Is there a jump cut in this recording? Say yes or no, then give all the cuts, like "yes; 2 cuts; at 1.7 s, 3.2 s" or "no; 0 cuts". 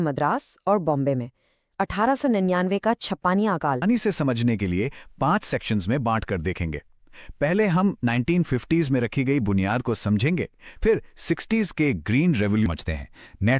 yes; 2 cuts; at 3.8 s, 12.7 s